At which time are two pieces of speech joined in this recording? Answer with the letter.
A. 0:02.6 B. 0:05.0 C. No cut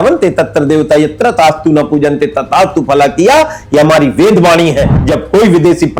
B